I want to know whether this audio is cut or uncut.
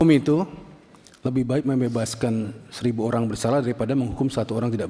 uncut